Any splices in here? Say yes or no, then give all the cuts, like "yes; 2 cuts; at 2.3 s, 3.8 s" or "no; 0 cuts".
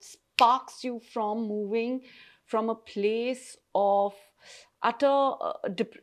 no; 0 cuts